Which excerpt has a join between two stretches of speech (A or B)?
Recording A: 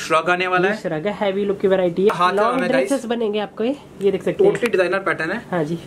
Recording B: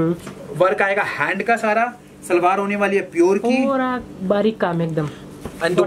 A